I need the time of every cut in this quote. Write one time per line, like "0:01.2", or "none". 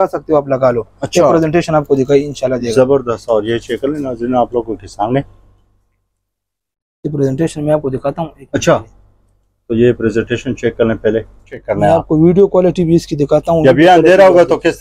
0:11.6